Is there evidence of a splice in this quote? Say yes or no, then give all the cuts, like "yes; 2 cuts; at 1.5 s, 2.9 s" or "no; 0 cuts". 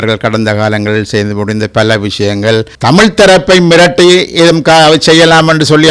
yes; 1 cut; at 2.7 s